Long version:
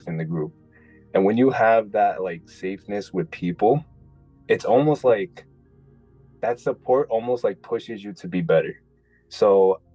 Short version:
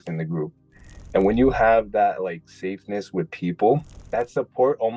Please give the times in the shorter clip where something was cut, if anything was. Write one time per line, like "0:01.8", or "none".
0:03.9